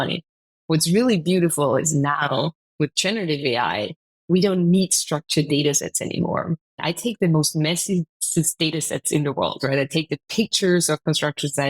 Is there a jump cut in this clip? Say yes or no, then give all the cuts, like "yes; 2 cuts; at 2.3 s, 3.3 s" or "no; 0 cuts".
yes; 1 cut; at 6.8 s